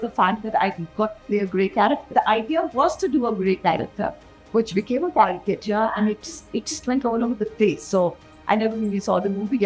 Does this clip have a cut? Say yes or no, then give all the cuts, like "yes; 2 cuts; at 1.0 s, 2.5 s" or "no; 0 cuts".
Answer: yes; 1 cut; at 2.1 s